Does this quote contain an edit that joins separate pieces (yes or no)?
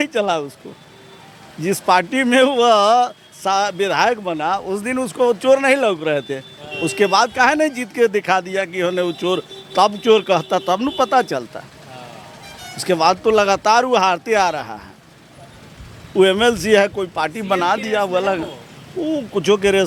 no